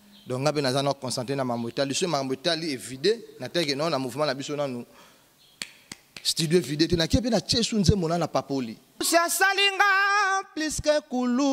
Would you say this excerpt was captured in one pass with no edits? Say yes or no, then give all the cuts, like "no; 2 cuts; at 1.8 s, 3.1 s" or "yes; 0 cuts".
no; 1 cut; at 9.1 s